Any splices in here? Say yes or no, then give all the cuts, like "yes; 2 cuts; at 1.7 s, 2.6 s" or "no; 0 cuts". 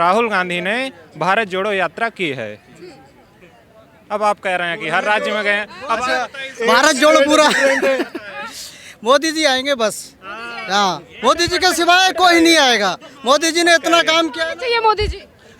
no; 0 cuts